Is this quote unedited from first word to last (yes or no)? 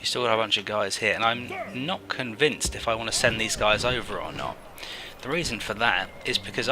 no